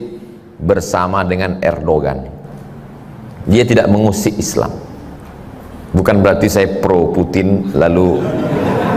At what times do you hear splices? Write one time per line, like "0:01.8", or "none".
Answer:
none

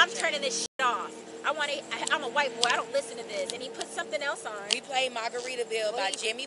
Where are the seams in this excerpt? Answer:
none

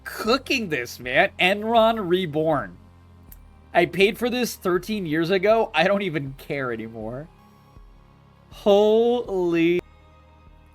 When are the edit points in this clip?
0:09.8

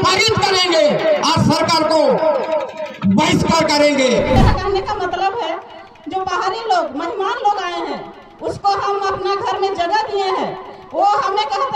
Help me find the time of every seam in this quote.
0:04.4

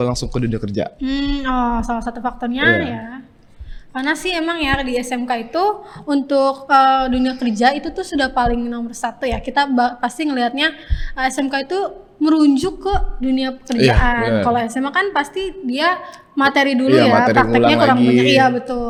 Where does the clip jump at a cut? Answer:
none

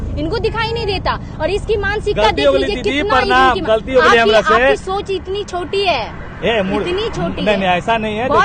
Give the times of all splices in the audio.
none

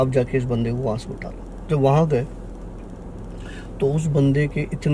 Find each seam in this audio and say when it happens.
none

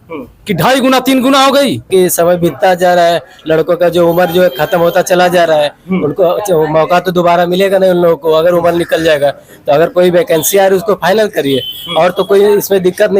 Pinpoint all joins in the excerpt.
0:01.9

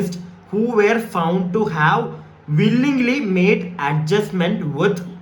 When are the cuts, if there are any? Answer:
none

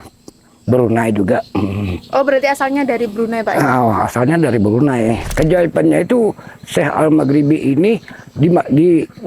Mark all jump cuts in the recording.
0:05.3

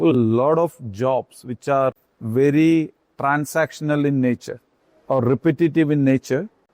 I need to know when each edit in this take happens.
0:02.1

